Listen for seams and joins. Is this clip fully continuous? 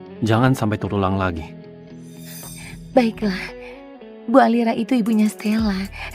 no; 2 cuts; at 1.4 s, 2.9 s

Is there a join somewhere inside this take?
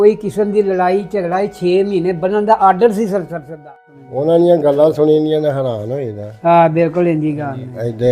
yes; 1 cut; at 3.6 s

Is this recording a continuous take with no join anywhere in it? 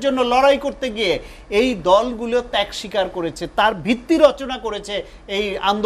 yes; 0 cuts

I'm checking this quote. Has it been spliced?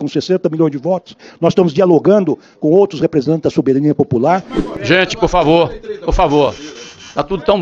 yes; 1 cut; at 4.6 s

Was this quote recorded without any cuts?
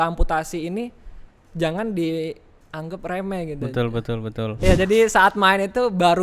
no; 1 cut; at 4.6 s

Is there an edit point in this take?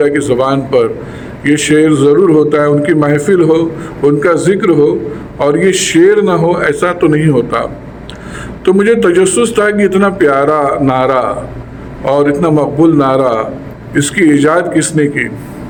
no; 0 cuts

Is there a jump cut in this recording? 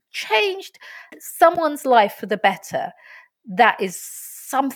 no; 0 cuts

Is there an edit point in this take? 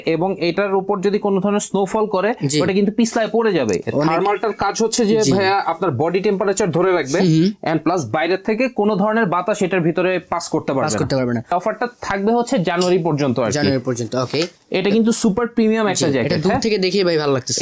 yes; 3 cuts; at 3.8 s, 11.5 s, 14.5 s

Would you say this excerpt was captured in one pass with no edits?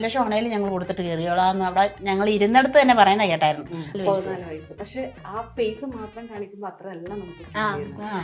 no; 1 cut; at 4.0 s

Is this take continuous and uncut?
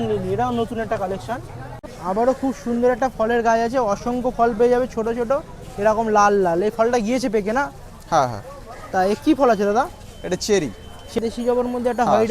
no; 2 cuts; at 1.8 s, 11.1 s

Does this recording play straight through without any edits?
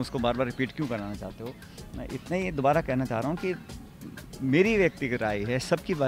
yes; 0 cuts

